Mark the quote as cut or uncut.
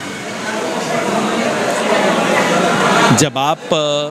uncut